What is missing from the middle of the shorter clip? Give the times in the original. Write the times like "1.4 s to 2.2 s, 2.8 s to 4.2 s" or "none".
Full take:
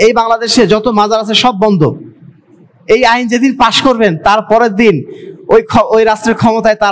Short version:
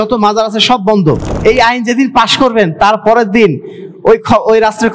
2.0 s to 2.7 s